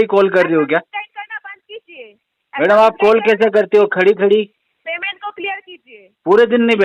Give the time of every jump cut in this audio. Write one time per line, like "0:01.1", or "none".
none